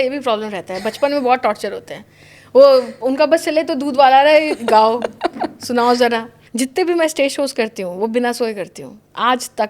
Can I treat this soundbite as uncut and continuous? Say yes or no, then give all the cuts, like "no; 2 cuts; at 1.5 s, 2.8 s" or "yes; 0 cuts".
no; 1 cut; at 6.4 s